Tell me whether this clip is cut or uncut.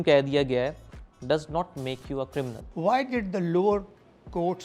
cut